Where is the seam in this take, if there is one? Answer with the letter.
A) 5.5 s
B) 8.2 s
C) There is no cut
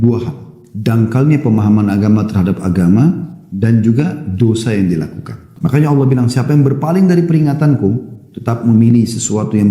A